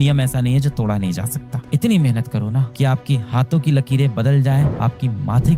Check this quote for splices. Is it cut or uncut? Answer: cut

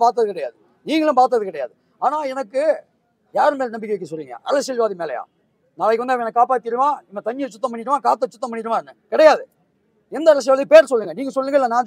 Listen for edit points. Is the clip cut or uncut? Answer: uncut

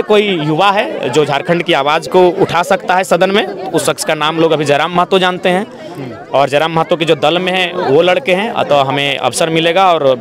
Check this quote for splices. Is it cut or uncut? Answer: uncut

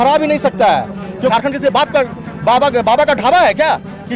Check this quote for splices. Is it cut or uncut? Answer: cut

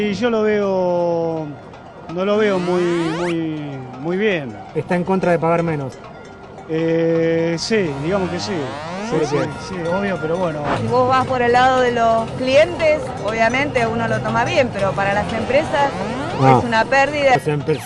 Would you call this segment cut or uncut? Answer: cut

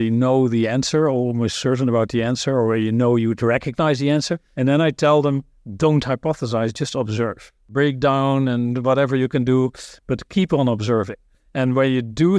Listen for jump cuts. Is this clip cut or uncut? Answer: cut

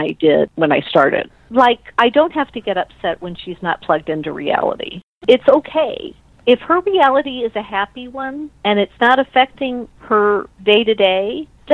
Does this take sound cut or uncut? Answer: cut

